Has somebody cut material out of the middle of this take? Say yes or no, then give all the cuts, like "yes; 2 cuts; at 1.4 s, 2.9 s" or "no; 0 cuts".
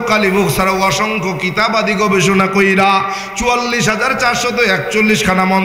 no; 0 cuts